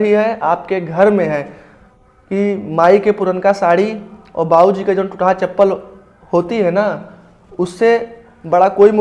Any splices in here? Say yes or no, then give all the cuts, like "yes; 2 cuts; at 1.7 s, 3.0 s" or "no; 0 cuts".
no; 0 cuts